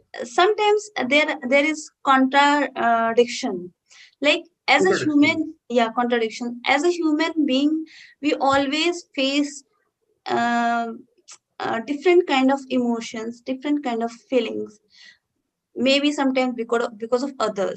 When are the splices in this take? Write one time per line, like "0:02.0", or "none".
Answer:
none

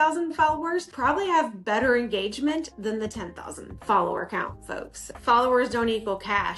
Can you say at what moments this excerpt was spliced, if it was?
0:05.1

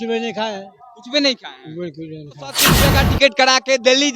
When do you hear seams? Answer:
0:02.7

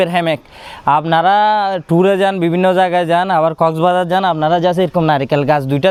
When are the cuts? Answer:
none

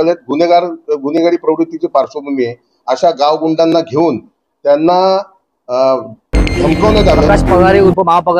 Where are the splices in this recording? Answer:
0:07.3

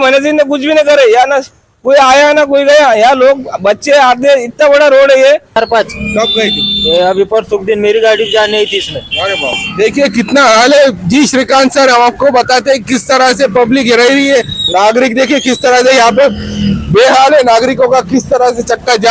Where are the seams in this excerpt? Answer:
0:05.6

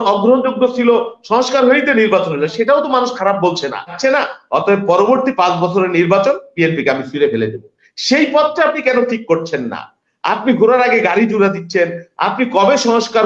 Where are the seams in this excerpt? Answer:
0:03.9

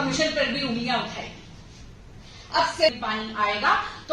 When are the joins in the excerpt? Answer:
0:02.9

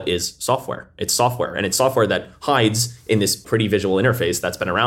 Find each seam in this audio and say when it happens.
0:03.4

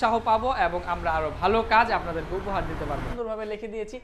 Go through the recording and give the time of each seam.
0:03.1

